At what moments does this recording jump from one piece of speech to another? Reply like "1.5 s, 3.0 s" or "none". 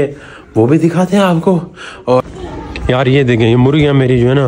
2.2 s